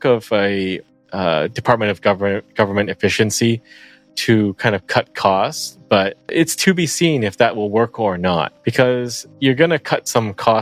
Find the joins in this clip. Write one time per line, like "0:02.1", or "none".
0:06.2
0:08.5
0:09.2